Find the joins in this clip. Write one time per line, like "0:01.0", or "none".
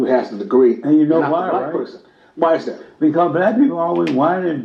none